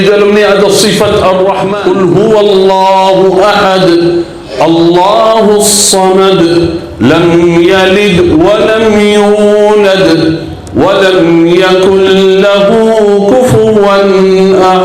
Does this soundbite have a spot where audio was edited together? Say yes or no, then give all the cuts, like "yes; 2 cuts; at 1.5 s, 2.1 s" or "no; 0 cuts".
yes; 1 cut; at 1.7 s